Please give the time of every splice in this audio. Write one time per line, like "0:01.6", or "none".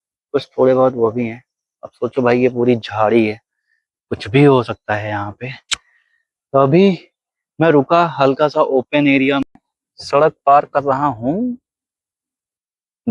0:09.4